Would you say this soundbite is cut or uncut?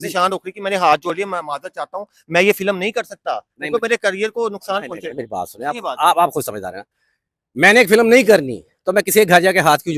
uncut